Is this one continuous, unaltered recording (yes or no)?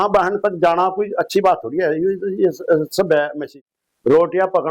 no